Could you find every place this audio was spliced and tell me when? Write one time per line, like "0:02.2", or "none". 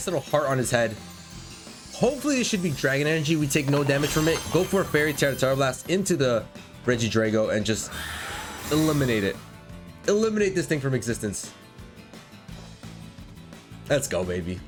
none